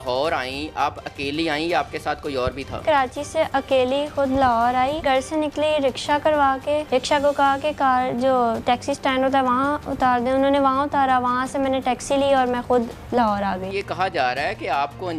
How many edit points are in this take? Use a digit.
4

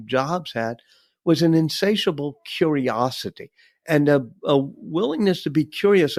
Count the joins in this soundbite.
0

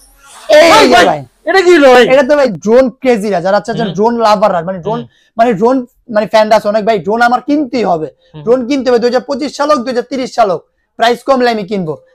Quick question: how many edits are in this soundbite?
1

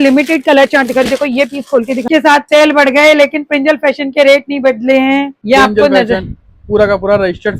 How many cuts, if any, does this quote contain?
2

